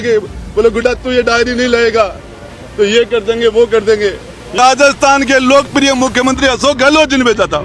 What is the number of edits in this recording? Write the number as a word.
one